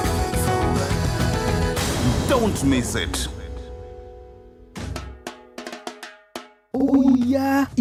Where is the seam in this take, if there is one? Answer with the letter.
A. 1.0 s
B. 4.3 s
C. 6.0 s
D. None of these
D